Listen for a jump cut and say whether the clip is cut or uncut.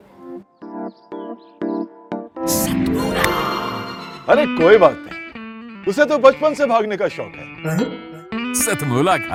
uncut